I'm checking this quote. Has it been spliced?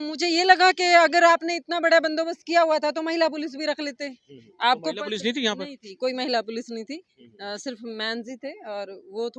no; 0 cuts

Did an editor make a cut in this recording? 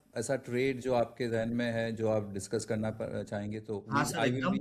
no; 0 cuts

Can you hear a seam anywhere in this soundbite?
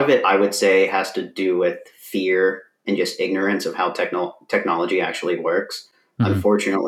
no; 0 cuts

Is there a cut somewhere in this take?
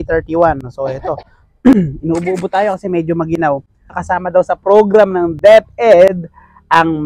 yes; 1 cut; at 4.0 s

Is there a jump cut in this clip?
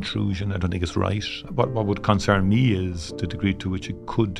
yes; 1 cut; at 1.3 s

